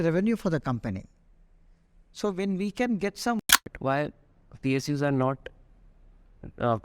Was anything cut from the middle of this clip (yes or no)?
yes